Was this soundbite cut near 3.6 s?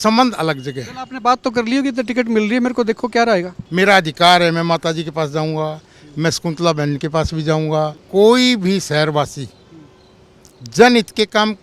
yes; 2 cuts; at 3.6 s, 8.0 s

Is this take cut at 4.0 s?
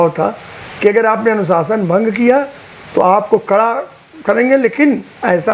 no; 0 cuts

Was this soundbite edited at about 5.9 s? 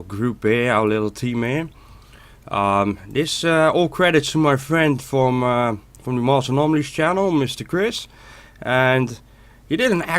yes; 1 cut; at 5.9 s

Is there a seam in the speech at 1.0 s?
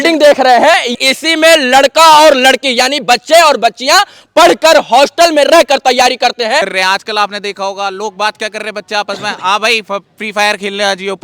yes; 2 cuts; at 1.0 s, 6.7 s

